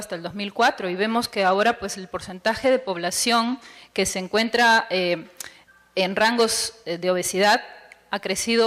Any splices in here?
yes; 1 cut; at 6.2 s

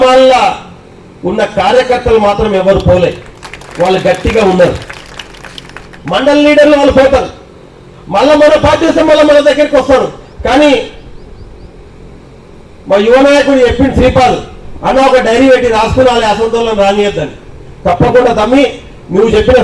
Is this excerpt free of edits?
yes; 0 cuts

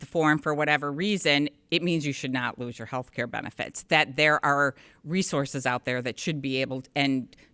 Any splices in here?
no; 0 cuts

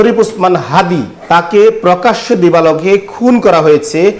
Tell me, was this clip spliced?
yes; 1 cut; at 1.1 s

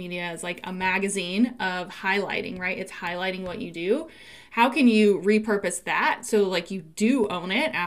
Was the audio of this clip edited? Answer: no; 0 cuts

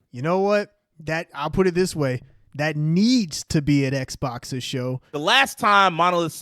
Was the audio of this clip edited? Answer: yes; 1 cut; at 5.0 s

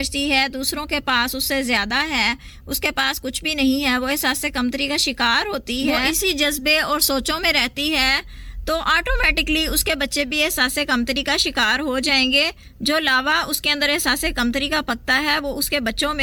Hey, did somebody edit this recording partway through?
no; 0 cuts

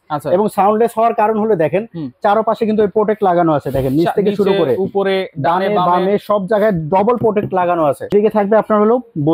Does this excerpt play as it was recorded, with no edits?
no; 1 cut; at 8.0 s

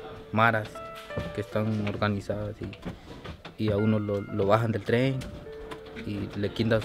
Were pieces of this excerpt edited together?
no; 0 cuts

